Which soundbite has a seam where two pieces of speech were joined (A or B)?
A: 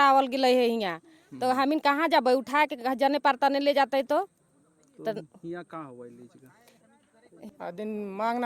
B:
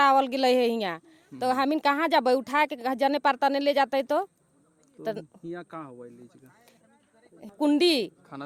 A